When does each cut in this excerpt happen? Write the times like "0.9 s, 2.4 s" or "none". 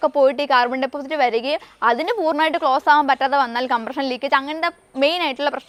none